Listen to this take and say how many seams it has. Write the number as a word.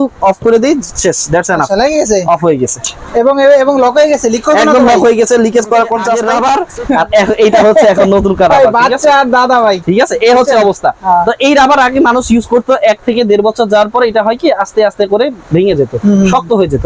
one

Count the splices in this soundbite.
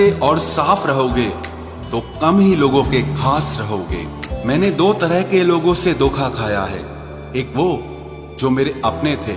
one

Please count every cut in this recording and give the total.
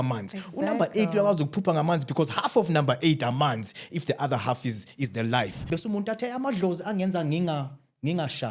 one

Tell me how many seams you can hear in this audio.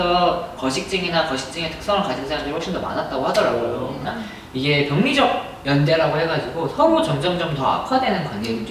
one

